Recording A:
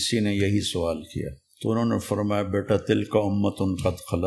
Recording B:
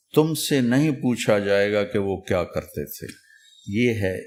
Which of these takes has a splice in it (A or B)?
A